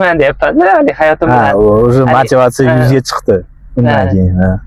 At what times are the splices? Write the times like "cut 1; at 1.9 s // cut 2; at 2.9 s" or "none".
none